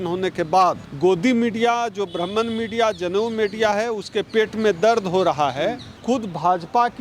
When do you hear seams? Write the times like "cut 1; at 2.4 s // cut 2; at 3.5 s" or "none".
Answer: cut 1; at 0.9 s // cut 2; at 5.9 s